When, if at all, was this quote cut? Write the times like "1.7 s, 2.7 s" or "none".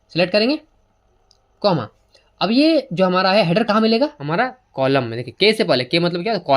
4.2 s

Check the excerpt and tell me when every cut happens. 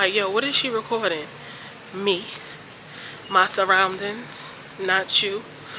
none

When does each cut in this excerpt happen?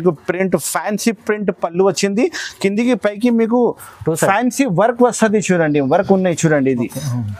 none

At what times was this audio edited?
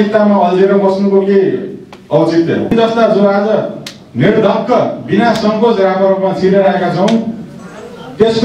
2.7 s

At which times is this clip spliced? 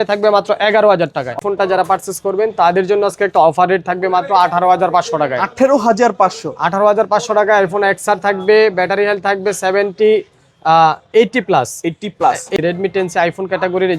1.4 s, 12.5 s

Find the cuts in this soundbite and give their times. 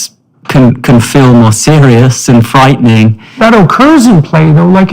3.4 s

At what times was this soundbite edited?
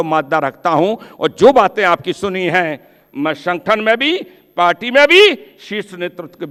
none

